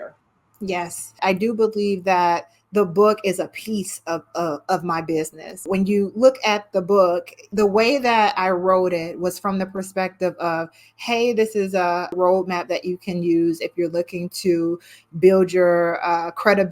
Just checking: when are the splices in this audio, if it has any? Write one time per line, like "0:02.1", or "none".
0:01.2
0:05.6
0:07.4
0:12.1